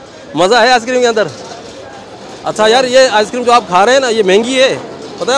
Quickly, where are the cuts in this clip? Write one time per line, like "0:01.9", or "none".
none